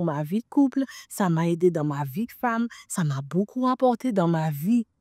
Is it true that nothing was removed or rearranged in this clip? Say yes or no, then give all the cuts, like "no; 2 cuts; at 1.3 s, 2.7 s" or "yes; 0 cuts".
yes; 0 cuts